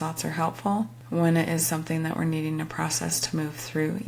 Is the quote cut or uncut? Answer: cut